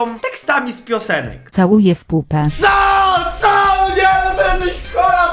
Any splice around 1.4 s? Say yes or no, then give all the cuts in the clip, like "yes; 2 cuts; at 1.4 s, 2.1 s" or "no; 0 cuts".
yes; 1 cut; at 1.4 s